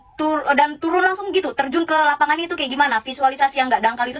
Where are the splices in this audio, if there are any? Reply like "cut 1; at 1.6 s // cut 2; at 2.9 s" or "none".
none